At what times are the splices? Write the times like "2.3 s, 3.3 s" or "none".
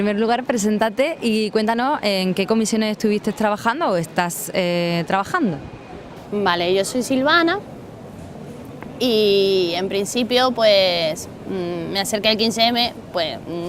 none

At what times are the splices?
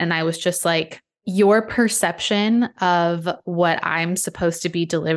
1.2 s

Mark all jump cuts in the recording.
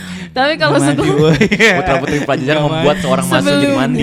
none

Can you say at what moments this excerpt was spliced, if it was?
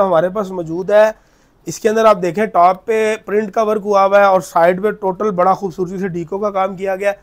none

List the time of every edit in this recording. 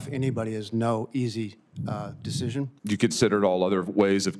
2.7 s

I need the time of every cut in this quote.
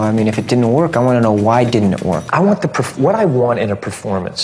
2.2 s

